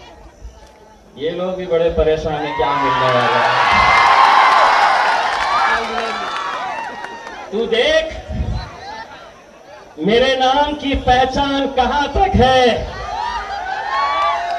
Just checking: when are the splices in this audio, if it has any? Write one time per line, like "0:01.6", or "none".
none